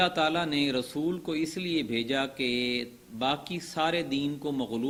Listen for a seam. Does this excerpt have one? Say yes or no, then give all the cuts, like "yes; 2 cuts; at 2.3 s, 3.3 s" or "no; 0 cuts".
no; 0 cuts